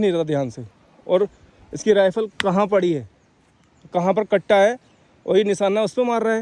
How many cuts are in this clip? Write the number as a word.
zero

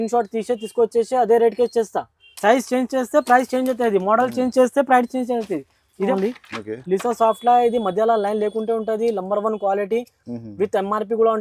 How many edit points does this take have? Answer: one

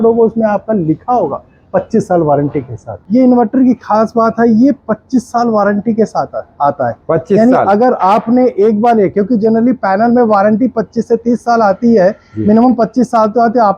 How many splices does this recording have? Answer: one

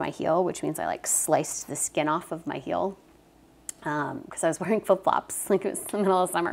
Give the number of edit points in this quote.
zero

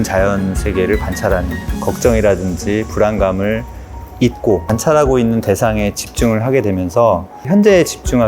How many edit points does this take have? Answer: two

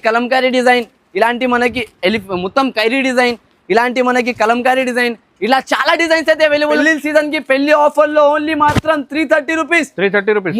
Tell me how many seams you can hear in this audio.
one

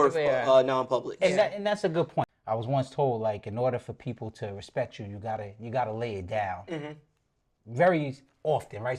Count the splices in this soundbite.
one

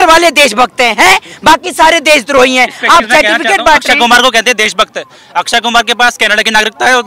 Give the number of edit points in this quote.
zero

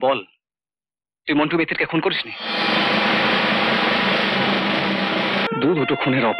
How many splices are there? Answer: one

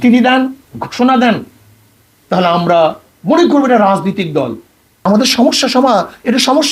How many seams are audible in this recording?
one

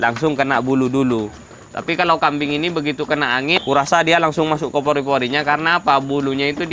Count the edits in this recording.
one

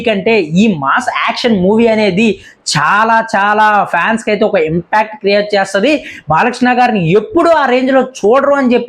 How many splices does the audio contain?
zero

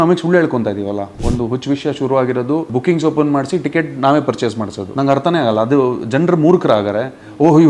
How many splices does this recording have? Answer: three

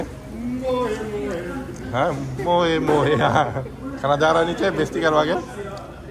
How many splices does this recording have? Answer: zero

